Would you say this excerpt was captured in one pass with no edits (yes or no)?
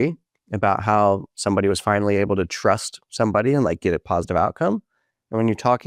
yes